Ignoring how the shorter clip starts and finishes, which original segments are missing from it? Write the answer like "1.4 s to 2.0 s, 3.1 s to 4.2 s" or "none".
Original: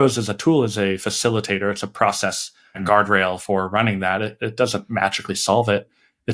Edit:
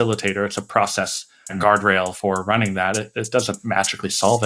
none